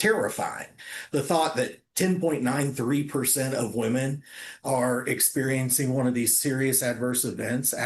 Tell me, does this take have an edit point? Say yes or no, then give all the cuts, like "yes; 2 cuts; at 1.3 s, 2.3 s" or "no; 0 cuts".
no; 0 cuts